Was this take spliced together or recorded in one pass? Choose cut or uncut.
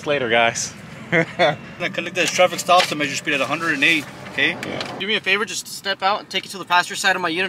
cut